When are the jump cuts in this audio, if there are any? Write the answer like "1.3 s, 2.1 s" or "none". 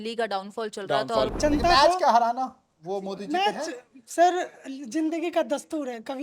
1.3 s